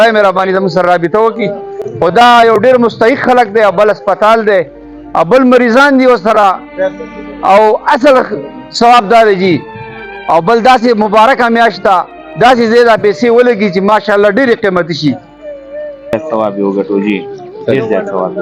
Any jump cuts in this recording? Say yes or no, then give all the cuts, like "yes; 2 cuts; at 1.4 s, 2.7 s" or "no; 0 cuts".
no; 0 cuts